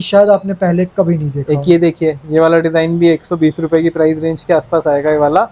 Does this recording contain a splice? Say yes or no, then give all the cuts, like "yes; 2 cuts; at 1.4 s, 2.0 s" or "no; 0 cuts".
no; 0 cuts